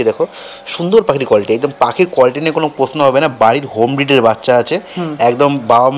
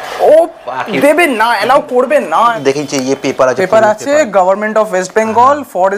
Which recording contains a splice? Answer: second; 1 cut; at 2.6 s

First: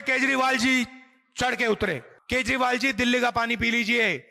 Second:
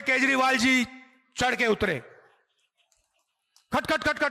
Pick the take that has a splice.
first; 1 cut; at 2.1 s

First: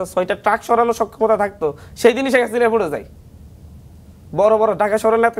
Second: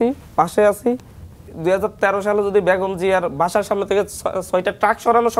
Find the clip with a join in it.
second; 1 cut; at 1.5 s

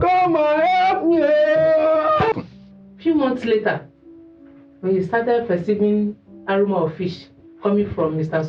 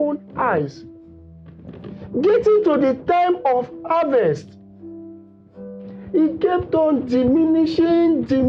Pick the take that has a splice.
first; 1 cut; at 2.3 s

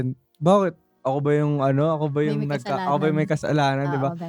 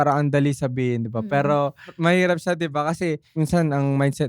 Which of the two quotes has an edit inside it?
second; 2 cuts; at 1.9 s, 3.2 s

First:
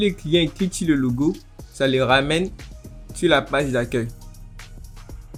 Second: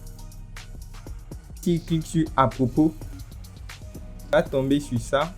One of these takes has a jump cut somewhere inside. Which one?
second; 2 cuts; at 1.6 s, 4.3 s

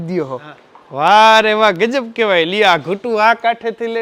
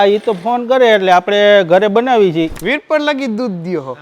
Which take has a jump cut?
second; 1 cut; at 2.5 s

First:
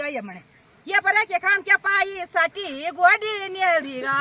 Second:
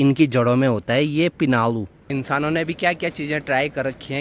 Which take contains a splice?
second; 1 cut; at 2.0 s

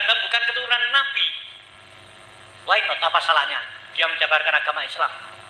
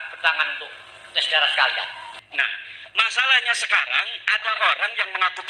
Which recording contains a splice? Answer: second; 1 cut; at 2.0 s

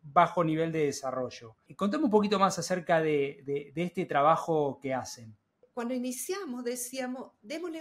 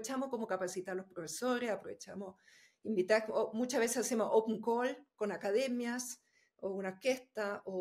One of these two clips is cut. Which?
first; 2 cuts; at 1.7 s, 5.6 s

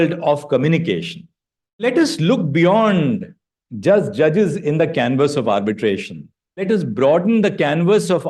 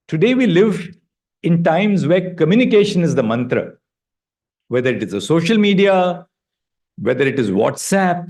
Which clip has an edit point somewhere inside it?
first; 2 cuts; at 1.8 s, 6.6 s

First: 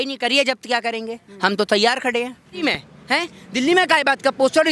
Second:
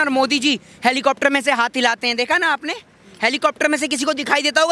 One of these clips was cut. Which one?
first; 1 cut; at 2.6 s

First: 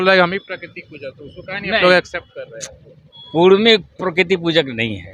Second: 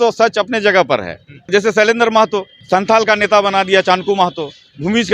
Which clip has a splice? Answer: second; 2 cuts; at 1.5 s, 2.5 s

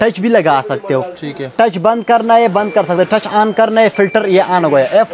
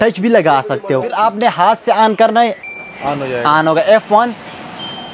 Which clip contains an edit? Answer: second; 1 cut; at 1.1 s

